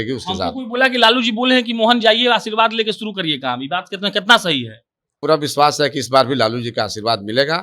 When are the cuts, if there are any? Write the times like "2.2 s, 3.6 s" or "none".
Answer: 5.2 s